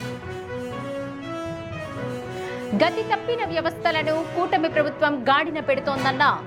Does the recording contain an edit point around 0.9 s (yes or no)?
yes